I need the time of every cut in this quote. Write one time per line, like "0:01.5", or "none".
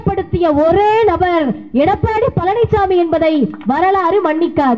none